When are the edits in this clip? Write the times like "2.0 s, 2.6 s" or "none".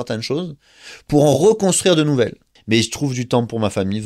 2.5 s